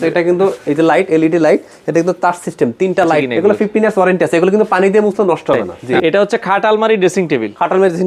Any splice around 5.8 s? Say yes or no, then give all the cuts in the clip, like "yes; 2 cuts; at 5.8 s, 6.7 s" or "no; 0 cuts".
yes; 2 cuts; at 3.3 s, 5.8 s